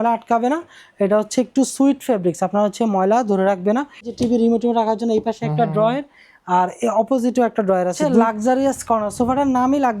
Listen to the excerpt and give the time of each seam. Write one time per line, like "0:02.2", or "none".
0:04.1
0:08.0